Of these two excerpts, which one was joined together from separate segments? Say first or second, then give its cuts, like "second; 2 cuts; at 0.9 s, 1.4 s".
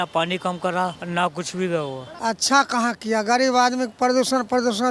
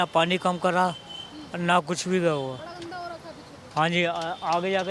first; 2 cuts; at 1.0 s, 2.1 s